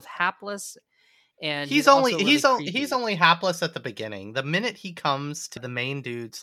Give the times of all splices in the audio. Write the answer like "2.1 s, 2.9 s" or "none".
5.5 s